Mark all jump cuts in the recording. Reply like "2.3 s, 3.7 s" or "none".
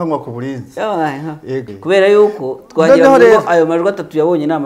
1.7 s